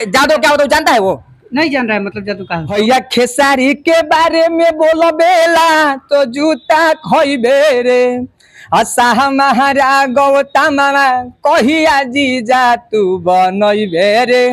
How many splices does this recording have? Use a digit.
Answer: 1